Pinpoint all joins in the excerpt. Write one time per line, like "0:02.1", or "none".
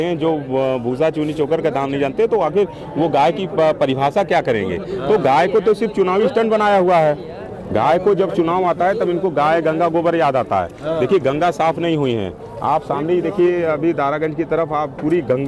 none